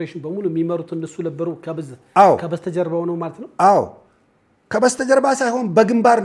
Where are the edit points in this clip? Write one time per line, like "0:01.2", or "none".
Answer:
none